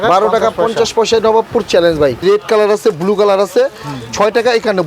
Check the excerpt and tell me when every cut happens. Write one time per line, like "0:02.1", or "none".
0:02.2